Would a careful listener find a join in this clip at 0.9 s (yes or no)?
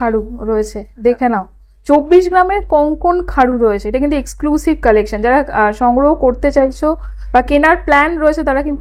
no